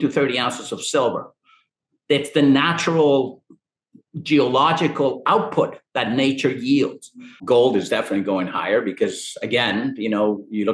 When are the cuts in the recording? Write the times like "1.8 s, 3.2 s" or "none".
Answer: 7.4 s